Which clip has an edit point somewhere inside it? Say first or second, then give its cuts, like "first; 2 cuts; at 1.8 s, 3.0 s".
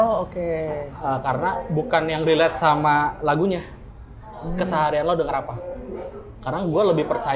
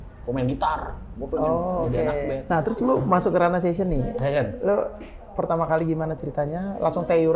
second; 1 cut; at 2.4 s